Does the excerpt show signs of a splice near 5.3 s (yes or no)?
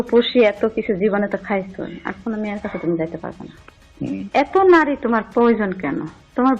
no